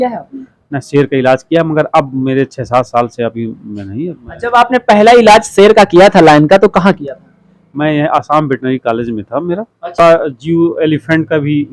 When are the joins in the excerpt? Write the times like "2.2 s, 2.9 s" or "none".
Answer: 10.0 s